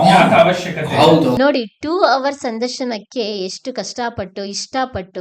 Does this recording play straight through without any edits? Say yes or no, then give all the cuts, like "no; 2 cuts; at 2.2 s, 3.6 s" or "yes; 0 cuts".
no; 1 cut; at 1.4 s